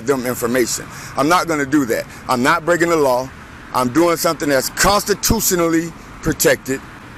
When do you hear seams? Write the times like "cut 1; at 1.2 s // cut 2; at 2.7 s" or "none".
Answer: none